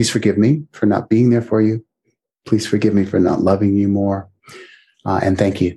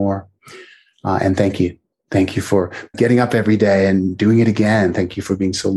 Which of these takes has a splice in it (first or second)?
second